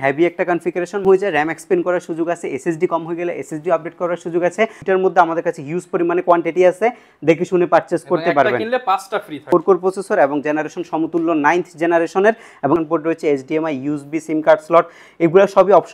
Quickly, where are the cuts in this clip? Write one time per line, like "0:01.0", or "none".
0:01.0
0:04.8
0:09.4
0:12.8